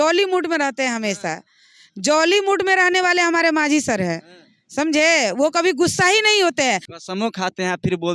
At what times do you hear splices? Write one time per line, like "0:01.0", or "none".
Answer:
0:06.9